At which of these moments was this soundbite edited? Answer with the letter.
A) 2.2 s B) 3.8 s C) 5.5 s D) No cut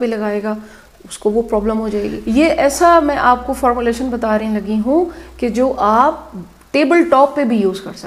A